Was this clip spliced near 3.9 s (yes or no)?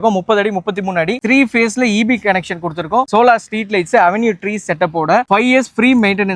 no